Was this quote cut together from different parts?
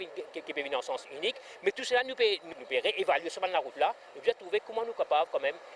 no; 0 cuts

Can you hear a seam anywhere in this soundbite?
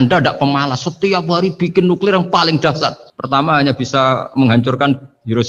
no; 0 cuts

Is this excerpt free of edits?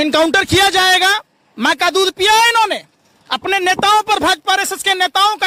yes; 0 cuts

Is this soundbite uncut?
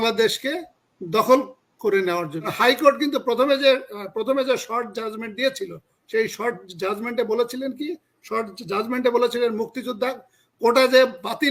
no; 1 cut; at 2.5 s

